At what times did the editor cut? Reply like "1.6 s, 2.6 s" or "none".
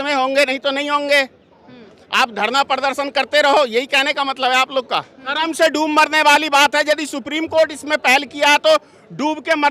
5.3 s